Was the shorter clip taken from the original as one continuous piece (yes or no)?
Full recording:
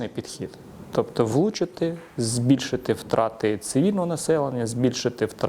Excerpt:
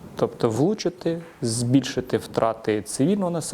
yes